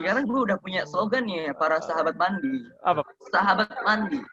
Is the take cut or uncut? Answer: cut